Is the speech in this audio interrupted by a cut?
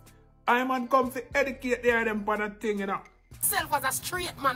yes; 1 cut; at 3.5 s

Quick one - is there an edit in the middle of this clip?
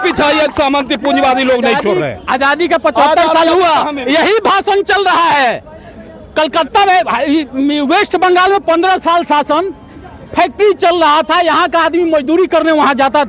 no; 0 cuts

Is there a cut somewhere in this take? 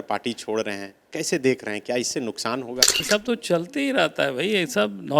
yes; 1 cut; at 3.0 s

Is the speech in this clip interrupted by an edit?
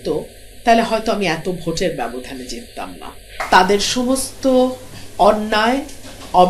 yes; 1 cut; at 3.3 s

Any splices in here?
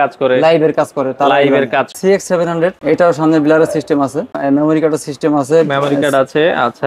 yes; 3 cuts; at 1.9 s, 2.8 s, 4.3 s

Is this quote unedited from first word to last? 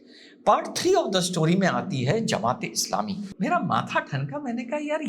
no; 1 cut; at 3.3 s

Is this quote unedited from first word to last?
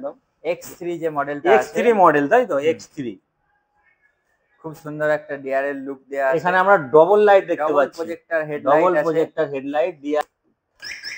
yes; 0 cuts

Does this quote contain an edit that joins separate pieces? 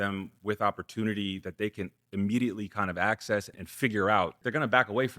yes; 2 cuts; at 3.6 s, 4.4 s

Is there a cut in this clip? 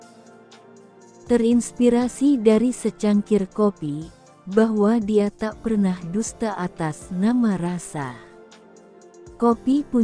yes; 1 cut; at 1.3 s

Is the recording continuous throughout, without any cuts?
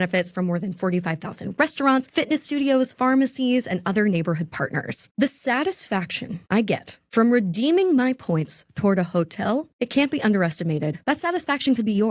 yes; 0 cuts

